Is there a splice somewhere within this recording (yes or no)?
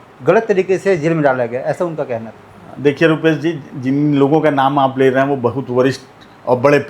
no